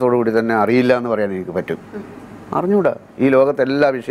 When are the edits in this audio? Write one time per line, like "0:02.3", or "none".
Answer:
none